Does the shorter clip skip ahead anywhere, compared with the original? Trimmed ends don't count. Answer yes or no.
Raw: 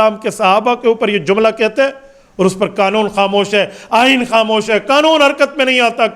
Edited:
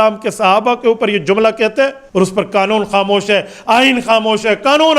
yes